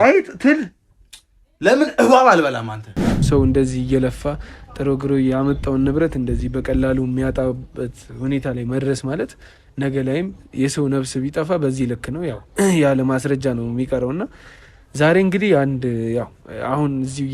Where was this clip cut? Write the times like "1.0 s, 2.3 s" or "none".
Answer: 3.2 s